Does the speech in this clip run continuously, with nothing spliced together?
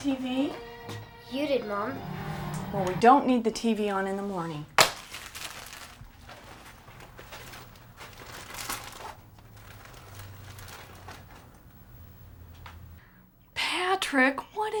yes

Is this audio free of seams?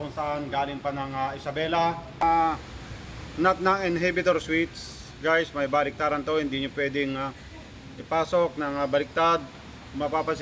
no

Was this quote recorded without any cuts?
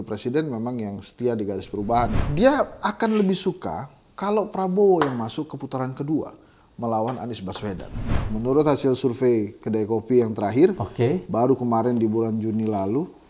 no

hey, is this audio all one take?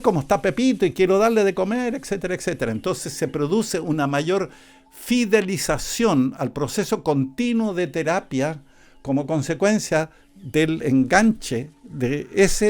yes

